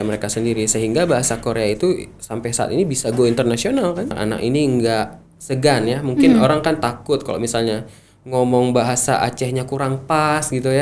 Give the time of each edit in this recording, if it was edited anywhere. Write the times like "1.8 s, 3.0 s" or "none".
4.2 s